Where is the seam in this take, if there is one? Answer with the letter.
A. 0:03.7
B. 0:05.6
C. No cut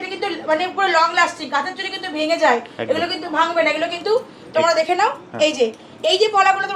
C